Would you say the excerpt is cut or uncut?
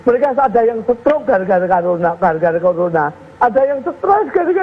uncut